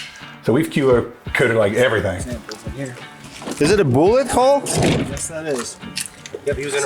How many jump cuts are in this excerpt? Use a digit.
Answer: 1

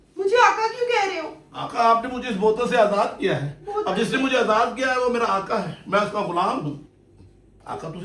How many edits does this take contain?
1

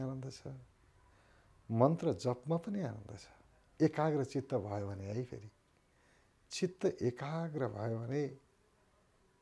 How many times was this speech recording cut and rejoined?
0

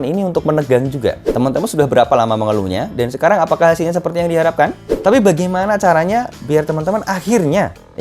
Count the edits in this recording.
2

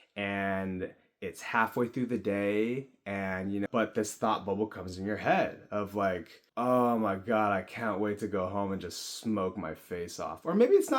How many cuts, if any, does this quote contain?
2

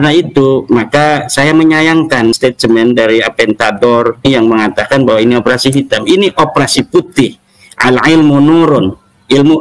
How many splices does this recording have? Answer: 2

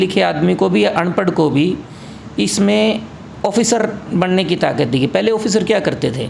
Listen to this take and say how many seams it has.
0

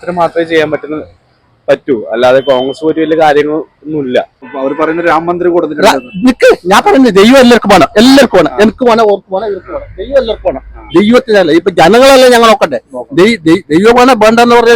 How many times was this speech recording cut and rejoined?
1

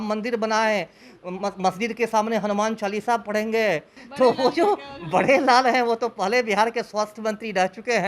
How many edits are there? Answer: 1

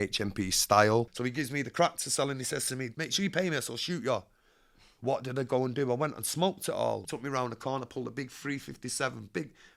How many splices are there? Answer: 3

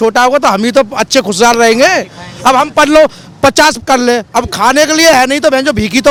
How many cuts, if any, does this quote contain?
0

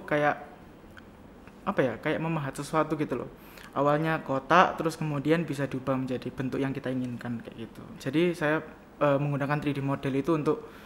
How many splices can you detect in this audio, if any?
1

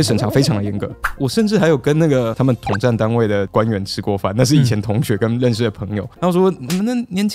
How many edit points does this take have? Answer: 2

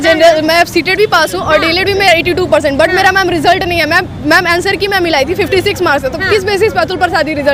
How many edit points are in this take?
0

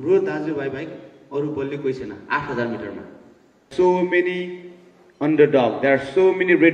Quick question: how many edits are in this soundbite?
1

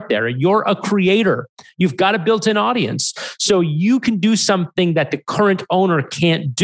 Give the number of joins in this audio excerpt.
0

